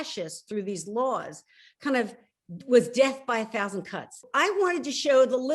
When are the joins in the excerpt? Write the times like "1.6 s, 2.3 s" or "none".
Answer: 4.2 s